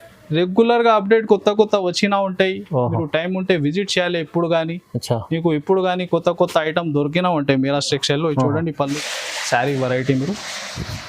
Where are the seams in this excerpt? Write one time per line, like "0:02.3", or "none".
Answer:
0:09.0